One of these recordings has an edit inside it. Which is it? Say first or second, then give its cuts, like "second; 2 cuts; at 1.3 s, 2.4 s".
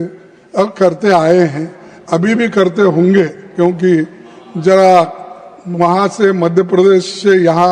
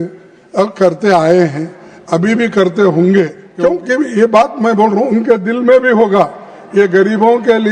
second; 1 cut; at 3.4 s